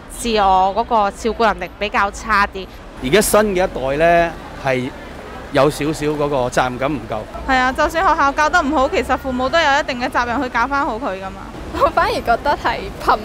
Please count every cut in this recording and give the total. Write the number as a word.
two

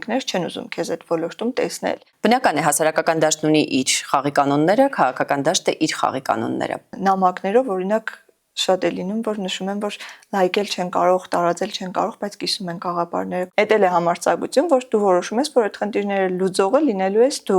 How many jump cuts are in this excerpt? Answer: three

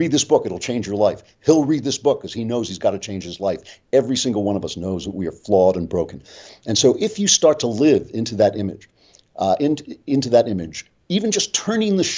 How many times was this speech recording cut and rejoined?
zero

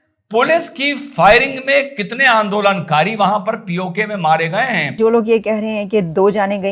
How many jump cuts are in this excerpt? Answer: one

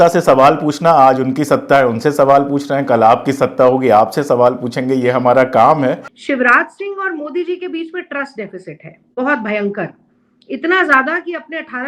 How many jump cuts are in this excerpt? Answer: one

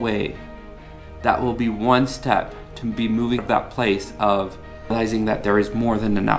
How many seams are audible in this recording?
two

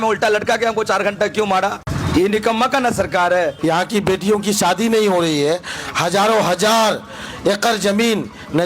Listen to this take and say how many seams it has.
two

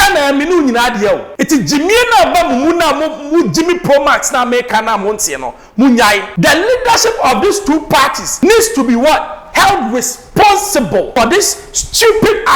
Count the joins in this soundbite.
five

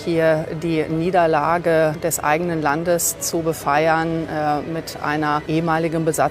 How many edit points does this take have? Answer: two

